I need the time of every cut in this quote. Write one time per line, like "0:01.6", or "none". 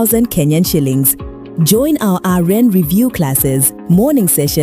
none